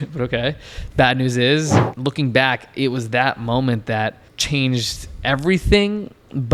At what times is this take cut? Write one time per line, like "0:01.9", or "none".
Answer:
0:01.8
0:04.3